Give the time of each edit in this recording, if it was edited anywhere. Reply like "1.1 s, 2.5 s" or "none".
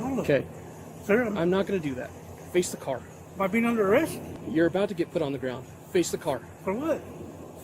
3.2 s, 4.4 s